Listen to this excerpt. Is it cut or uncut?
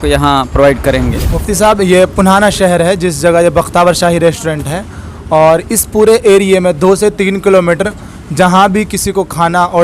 cut